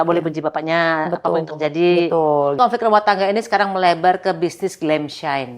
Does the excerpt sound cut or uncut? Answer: cut